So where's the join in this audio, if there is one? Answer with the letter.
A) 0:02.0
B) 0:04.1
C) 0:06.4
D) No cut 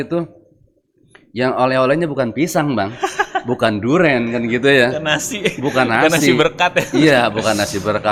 D